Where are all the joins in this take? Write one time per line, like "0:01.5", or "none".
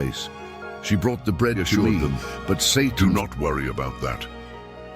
0:02.9